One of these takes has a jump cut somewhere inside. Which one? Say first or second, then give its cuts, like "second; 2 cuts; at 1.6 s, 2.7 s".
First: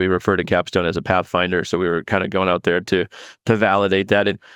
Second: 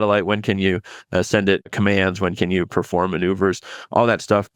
second; 1 cut; at 1.7 s